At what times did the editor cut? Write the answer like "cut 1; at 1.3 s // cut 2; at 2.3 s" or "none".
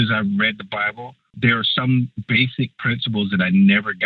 cut 1; at 1.3 s // cut 2; at 2.2 s